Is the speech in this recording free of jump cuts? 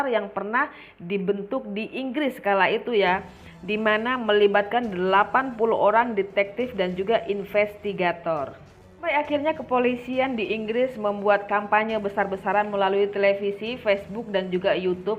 yes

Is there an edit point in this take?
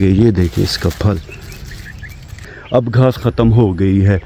yes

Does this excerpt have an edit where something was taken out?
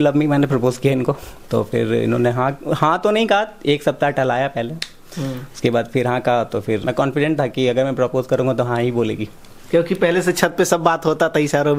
yes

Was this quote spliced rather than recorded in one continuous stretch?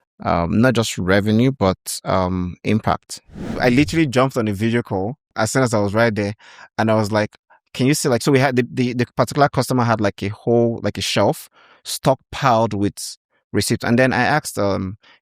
yes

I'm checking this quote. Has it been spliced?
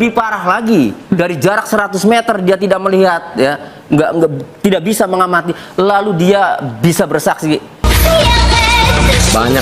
yes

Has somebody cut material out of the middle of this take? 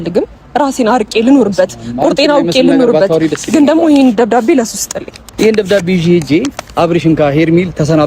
yes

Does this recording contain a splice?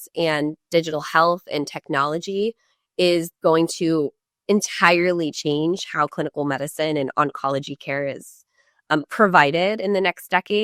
no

